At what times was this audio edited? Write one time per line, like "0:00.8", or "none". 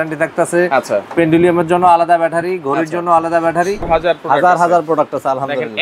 0:03.9